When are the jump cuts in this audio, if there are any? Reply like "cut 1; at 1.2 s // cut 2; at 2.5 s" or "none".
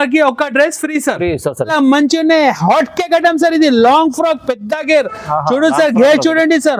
cut 1; at 1.7 s